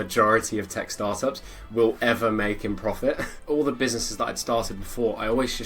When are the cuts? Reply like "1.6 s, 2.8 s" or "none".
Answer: 3.3 s